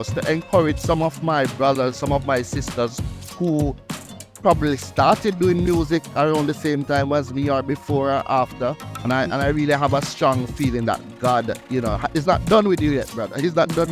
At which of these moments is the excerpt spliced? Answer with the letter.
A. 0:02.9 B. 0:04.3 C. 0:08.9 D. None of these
C